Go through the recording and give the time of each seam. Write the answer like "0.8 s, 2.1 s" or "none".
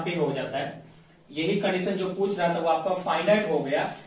none